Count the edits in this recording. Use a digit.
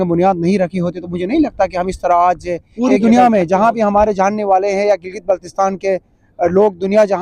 1